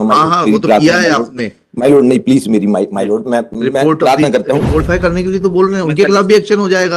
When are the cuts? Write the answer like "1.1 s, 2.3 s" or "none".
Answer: 4.8 s